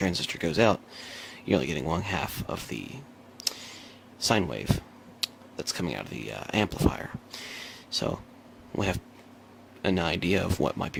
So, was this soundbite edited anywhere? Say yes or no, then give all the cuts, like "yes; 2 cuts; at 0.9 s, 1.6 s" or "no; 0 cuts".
no; 0 cuts